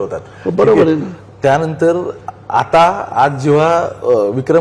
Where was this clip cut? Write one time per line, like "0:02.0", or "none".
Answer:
none